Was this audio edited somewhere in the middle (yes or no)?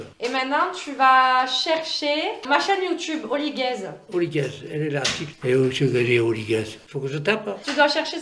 yes